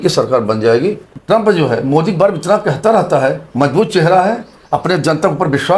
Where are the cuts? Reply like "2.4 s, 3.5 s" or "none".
1.1 s